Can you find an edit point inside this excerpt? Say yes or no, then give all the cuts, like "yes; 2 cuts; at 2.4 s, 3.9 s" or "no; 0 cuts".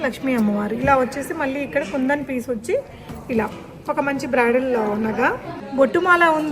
yes; 1 cut; at 5.6 s